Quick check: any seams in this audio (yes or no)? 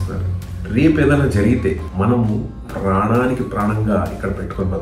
yes